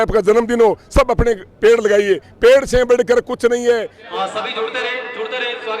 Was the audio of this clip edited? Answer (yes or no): yes